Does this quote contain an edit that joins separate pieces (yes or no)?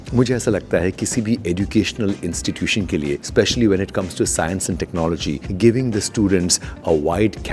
yes